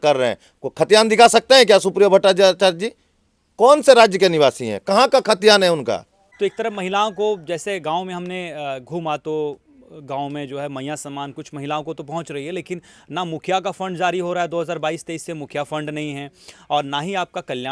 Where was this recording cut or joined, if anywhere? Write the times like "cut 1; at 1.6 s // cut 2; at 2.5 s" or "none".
cut 1; at 6.2 s